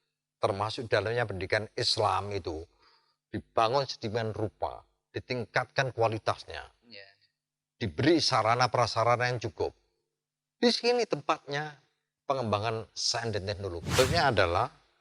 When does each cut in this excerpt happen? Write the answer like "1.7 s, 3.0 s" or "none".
13.9 s